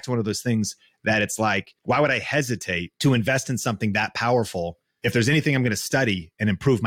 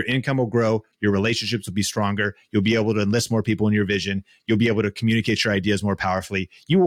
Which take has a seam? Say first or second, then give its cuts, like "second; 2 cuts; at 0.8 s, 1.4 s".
first; 3 cuts; at 1.7 s, 2.9 s, 4.8 s